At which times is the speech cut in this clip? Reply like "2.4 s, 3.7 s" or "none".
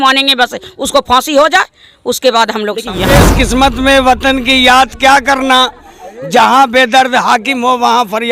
3.1 s